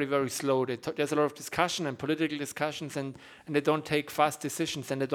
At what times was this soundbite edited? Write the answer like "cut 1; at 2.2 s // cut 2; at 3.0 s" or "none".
none